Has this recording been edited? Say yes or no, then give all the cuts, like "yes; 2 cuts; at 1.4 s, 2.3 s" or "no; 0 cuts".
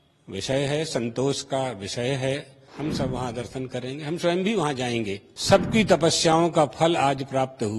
yes; 2 cuts; at 2.6 s, 5.3 s